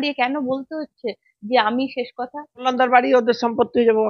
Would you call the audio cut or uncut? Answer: cut